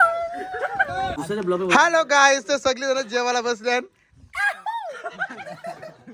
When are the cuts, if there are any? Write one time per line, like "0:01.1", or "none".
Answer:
0:01.2